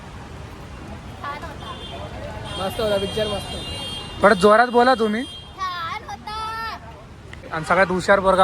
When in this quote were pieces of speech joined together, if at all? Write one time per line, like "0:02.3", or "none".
0:07.5